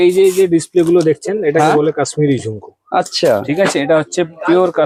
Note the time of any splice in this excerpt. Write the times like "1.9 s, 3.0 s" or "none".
none